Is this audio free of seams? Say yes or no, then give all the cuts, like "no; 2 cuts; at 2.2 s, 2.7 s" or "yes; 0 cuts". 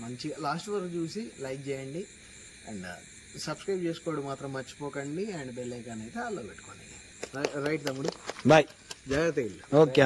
no; 1 cut; at 7.1 s